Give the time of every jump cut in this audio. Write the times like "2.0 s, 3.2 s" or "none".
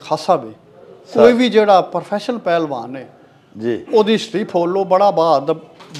none